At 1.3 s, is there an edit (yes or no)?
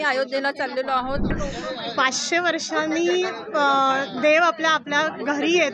yes